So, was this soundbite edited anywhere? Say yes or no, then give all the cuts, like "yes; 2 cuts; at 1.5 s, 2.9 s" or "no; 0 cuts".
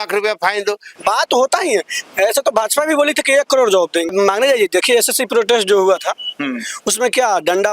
yes; 2 cuts; at 0.9 s, 4.1 s